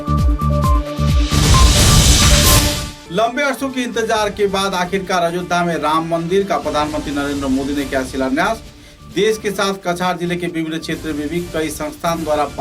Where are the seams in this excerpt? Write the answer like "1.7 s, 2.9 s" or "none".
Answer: none

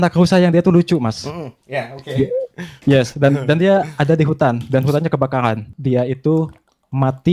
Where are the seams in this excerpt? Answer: 5.8 s

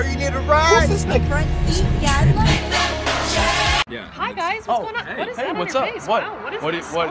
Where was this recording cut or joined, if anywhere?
4.3 s

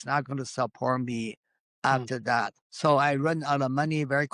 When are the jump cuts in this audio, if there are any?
2.6 s

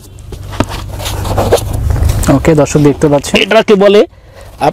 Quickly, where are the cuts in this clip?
none

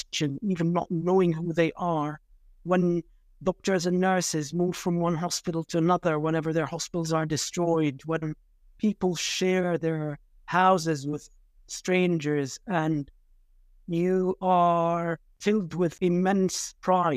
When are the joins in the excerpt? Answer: 15.3 s, 15.9 s

